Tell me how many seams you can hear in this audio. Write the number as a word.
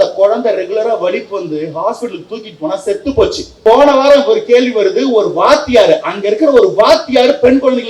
one